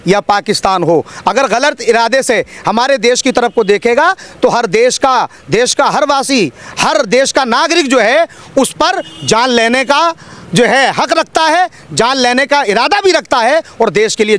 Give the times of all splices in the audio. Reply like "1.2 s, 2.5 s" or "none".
none